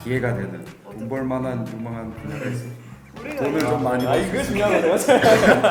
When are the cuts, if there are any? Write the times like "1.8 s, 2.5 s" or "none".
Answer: none